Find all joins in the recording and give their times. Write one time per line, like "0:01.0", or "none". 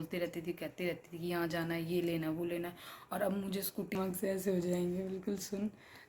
0:04.0